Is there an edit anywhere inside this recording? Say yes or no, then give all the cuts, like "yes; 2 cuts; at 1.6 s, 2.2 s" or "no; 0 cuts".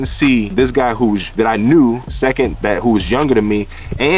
yes; 2 cuts; at 0.9 s, 2.1 s